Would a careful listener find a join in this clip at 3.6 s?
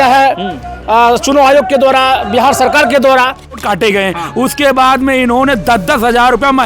yes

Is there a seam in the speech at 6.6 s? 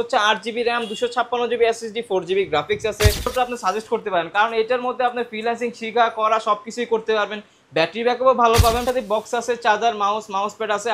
no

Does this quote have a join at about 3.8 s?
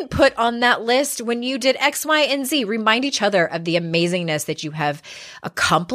no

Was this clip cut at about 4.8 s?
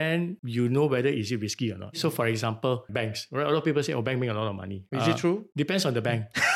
yes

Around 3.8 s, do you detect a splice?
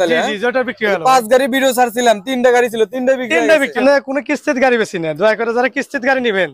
yes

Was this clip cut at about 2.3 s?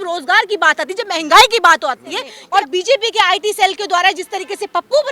yes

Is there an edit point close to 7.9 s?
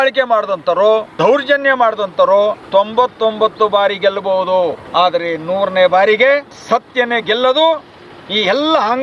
no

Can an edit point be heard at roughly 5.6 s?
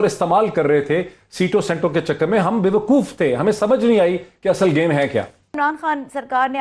yes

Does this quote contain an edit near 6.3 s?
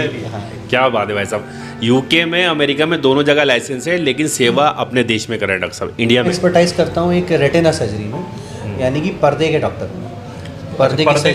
yes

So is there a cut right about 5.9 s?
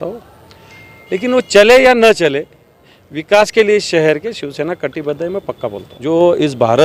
yes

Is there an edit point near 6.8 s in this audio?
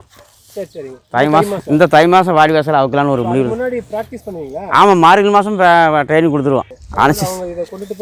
yes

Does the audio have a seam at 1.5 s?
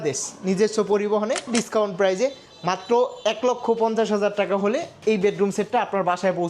yes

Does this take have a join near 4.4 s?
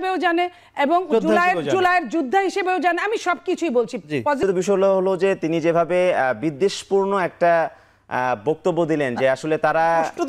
yes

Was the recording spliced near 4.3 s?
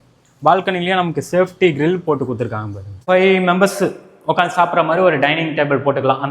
no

